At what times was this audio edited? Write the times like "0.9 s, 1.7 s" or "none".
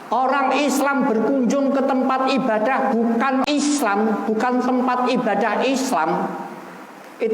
3.4 s